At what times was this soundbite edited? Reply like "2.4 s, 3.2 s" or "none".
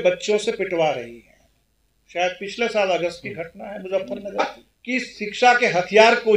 4.4 s